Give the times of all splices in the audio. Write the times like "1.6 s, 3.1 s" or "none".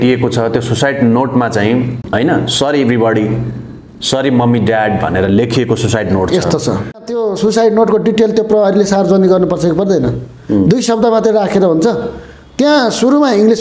2.0 s, 7.1 s